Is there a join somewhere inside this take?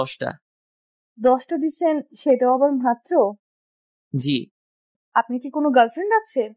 yes; 1 cut; at 5.0 s

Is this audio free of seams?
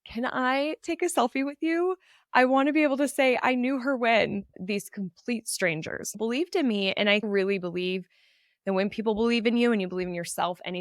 no; 2 cuts; at 4.5 s, 6.1 s

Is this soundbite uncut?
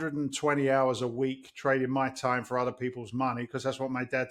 yes; 0 cuts

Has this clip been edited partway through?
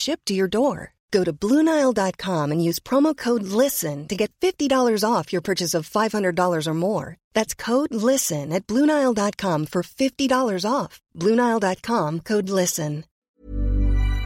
yes; 1 cut; at 13.2 s

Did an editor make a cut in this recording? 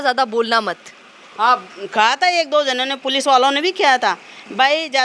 no; 0 cuts

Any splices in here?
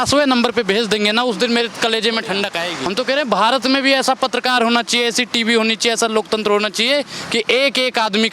yes; 1 cut; at 2.7 s

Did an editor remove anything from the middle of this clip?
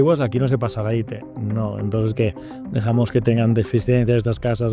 no; 0 cuts

